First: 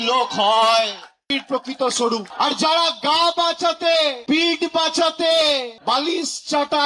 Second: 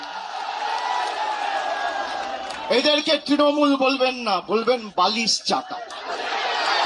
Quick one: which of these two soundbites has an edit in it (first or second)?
first